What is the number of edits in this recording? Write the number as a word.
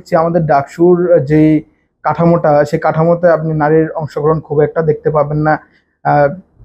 zero